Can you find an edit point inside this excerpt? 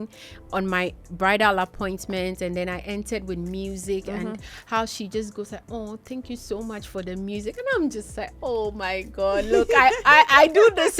no; 0 cuts

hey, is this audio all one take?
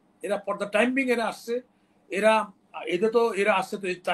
yes; 0 cuts

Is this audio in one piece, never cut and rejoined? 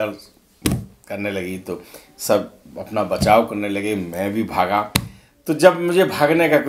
yes; 0 cuts

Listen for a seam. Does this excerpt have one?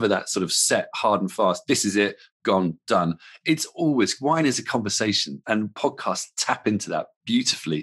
no; 0 cuts

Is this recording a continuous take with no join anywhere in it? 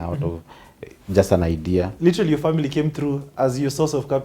no; 1 cut; at 1.9 s

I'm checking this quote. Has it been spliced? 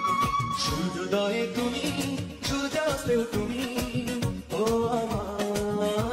no; 0 cuts

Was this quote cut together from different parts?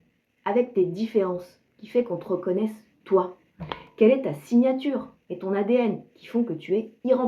no; 0 cuts

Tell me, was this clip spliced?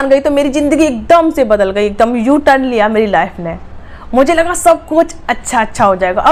no; 0 cuts

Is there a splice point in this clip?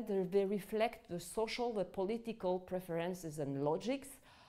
no; 0 cuts

